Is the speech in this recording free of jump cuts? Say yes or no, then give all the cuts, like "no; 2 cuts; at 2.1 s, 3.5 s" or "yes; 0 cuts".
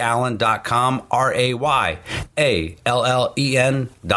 yes; 0 cuts